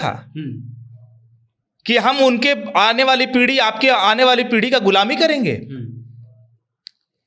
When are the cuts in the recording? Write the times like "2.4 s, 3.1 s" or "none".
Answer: none